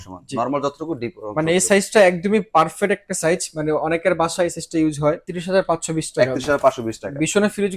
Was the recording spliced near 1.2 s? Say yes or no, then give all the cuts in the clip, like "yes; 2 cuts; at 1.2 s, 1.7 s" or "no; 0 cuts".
no; 1 cut; at 5.3 s